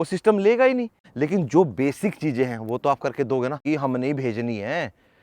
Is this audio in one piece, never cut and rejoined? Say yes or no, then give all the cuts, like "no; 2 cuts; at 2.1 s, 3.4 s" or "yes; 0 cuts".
no; 2 cuts; at 1.0 s, 3.6 s